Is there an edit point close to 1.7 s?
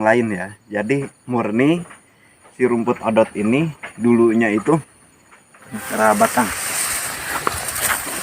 no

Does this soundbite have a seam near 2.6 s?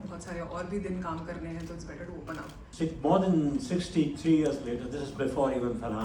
yes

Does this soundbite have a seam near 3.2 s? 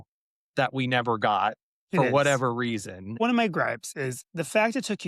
yes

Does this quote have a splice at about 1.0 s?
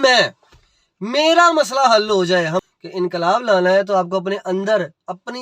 no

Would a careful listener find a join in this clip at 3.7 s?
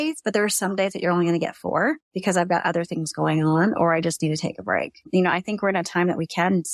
no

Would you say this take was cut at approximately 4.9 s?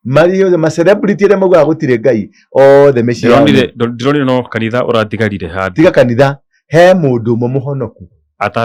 no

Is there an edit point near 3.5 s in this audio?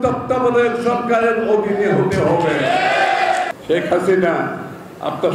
yes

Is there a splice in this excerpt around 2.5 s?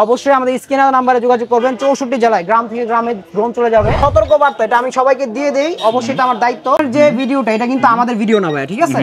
no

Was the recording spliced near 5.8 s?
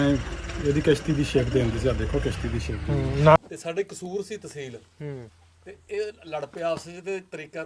no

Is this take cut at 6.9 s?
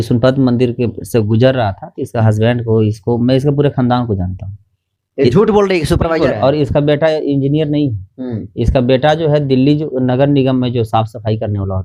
no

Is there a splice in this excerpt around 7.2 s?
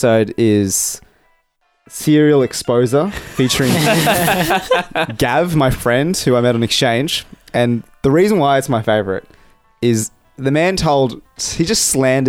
no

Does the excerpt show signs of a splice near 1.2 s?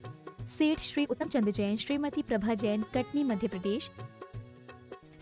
yes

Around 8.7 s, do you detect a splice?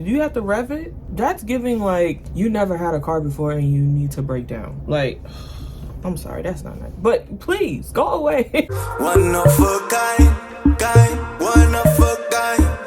yes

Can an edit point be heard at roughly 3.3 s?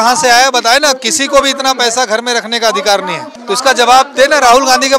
yes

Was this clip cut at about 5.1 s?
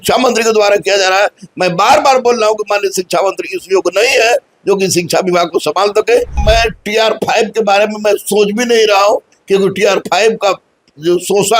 no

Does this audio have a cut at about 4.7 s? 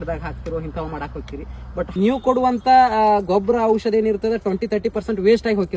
no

